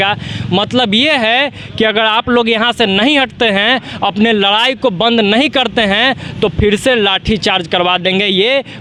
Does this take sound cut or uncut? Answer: uncut